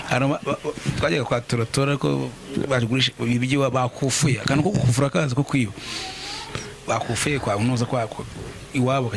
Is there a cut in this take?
no; 0 cuts

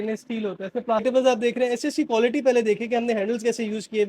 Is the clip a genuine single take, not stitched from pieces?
no; 1 cut; at 1.0 s

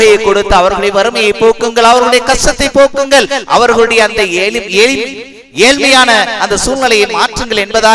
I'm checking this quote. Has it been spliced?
no; 0 cuts

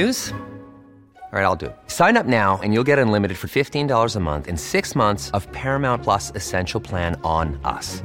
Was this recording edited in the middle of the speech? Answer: no; 0 cuts

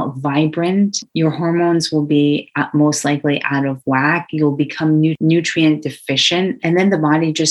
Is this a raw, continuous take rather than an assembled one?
no; 3 cuts; at 1.1 s, 5.2 s, 6.6 s

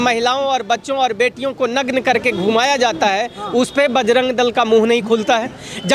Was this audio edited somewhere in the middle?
no; 0 cuts

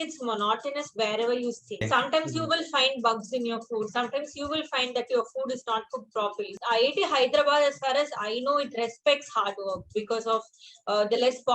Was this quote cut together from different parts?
yes; 2 cuts; at 1.9 s, 6.5 s

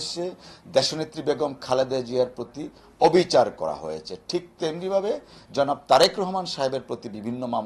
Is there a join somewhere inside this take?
no; 0 cuts

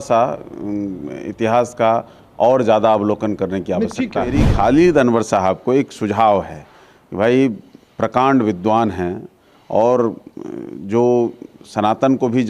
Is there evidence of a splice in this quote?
yes; 1 cut; at 4.4 s

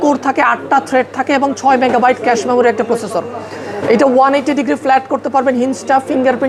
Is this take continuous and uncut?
yes; 0 cuts

